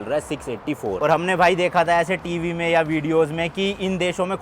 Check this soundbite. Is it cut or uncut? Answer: cut